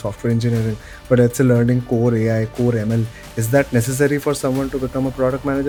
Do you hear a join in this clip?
no; 0 cuts

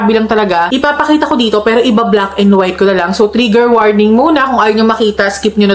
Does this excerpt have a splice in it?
no; 0 cuts

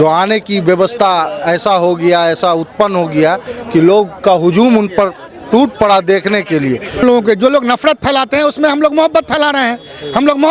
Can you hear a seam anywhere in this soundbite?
yes; 1 cut; at 7.0 s

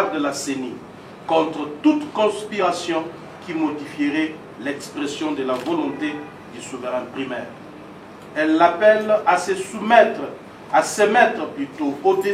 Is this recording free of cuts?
yes; 0 cuts

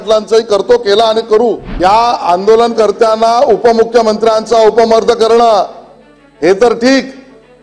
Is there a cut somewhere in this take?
yes; 1 cut; at 1.7 s

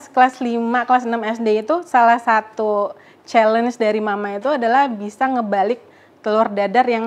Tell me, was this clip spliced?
no; 0 cuts

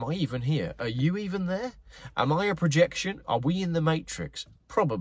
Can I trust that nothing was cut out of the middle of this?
yes; 0 cuts

